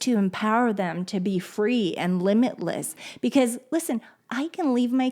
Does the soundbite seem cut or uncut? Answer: uncut